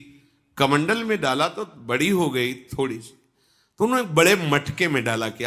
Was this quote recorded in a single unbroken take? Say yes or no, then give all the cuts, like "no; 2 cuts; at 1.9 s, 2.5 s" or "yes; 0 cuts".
yes; 0 cuts